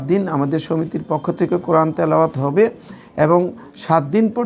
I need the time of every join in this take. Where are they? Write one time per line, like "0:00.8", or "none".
none